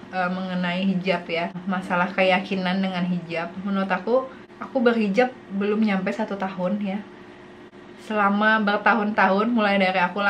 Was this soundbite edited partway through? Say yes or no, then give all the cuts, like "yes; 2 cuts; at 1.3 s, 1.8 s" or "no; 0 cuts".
no; 0 cuts